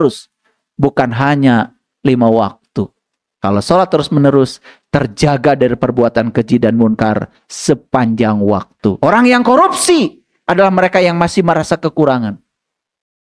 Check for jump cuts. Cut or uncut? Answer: cut